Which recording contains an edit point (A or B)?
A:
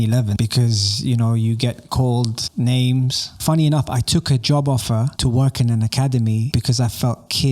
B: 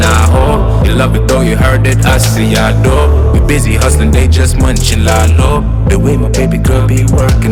A